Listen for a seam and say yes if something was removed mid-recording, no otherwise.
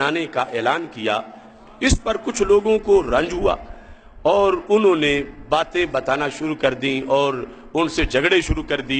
no